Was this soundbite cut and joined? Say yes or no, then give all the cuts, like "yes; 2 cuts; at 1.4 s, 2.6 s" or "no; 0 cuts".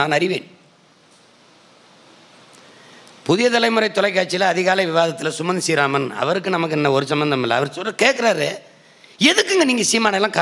no; 0 cuts